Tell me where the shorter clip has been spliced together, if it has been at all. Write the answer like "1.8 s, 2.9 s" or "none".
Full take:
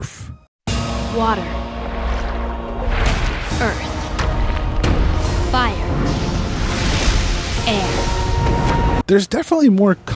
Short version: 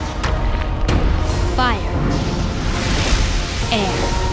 none